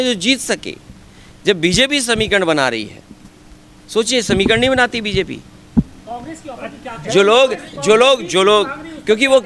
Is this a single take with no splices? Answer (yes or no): yes